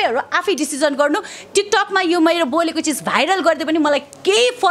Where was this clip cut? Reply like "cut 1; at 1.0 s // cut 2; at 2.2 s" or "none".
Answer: none